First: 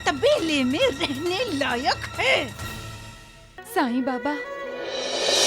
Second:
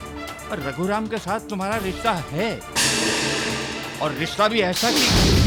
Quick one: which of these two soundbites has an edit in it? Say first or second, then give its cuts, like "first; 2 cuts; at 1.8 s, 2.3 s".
first; 1 cut; at 3.6 s